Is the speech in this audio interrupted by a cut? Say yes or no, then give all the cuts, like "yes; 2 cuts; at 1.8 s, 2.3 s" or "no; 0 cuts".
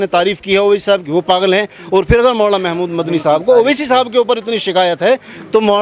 no; 0 cuts